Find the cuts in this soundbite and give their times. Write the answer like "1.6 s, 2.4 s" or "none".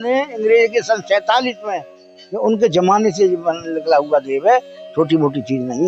none